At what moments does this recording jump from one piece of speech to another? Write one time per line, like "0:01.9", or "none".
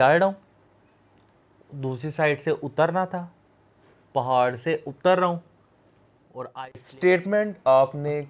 0:06.6